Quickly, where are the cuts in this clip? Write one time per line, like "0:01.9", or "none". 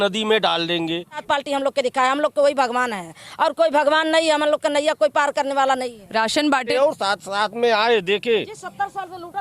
0:01.2
0:06.7